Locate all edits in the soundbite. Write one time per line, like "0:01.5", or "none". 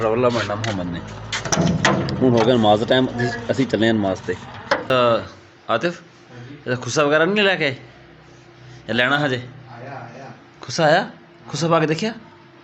none